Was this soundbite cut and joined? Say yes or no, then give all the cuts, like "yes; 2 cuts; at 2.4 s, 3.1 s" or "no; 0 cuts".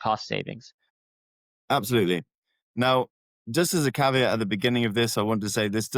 yes; 1 cut; at 1.0 s